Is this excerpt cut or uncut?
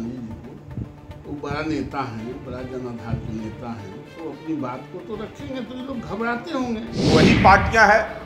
cut